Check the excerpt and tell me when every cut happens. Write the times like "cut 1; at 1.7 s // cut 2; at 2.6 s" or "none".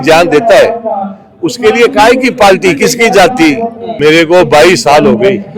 cut 1; at 3.9 s